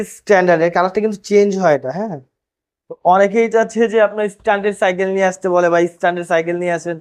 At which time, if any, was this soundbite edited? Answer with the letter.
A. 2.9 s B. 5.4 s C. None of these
A